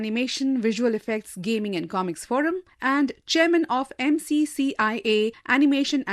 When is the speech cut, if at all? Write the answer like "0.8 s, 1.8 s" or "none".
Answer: none